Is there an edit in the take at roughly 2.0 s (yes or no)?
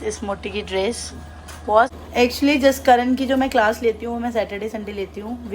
yes